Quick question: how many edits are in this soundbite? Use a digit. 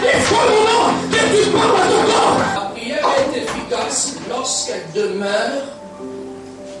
1